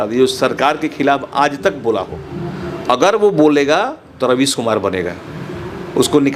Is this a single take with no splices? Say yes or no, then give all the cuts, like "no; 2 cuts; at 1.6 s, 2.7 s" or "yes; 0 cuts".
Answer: yes; 0 cuts